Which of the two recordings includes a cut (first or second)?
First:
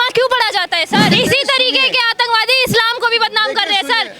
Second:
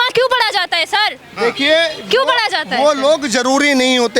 first